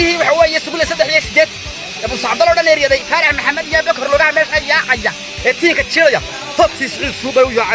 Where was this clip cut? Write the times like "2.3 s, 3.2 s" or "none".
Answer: none